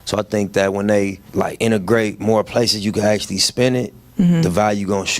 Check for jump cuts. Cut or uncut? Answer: cut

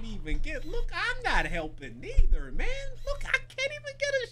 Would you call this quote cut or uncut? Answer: uncut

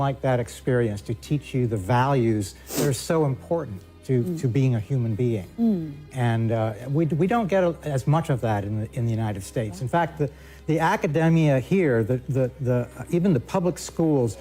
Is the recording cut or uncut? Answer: uncut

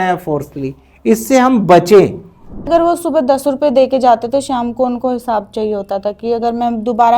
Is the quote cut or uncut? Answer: cut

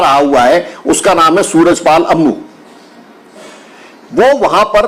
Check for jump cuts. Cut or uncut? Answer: uncut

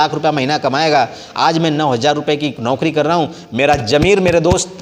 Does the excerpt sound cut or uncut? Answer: uncut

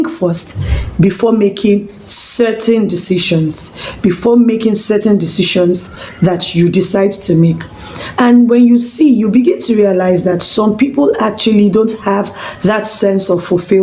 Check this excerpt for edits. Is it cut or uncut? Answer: uncut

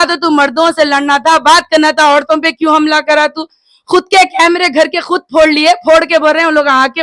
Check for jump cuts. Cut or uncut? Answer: uncut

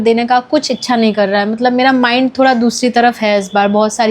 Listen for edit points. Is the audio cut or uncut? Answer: uncut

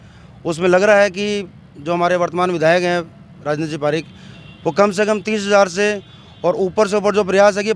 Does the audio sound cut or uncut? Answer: uncut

